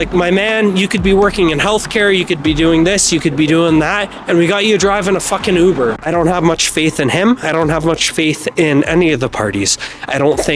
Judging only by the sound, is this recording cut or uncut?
cut